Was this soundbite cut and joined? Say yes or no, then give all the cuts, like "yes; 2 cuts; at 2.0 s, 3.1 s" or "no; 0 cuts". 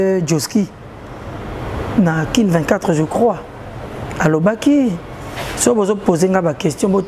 no; 0 cuts